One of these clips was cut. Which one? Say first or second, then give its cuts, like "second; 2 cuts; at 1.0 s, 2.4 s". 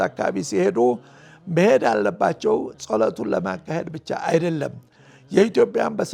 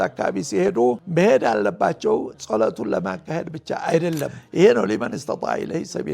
second; 2 cuts; at 1.0 s, 4.4 s